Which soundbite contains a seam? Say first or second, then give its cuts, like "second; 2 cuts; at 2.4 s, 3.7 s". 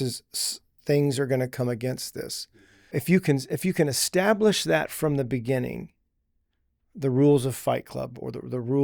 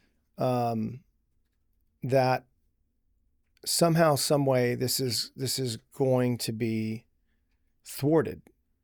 first; 1 cut; at 2.9 s